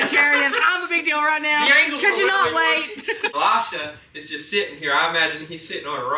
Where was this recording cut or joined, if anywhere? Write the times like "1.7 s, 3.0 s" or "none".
3.3 s